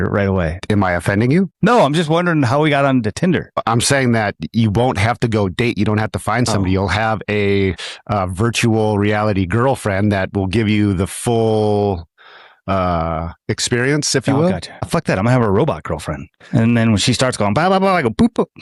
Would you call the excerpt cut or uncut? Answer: uncut